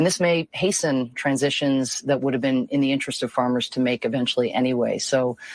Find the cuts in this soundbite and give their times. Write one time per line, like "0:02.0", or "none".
none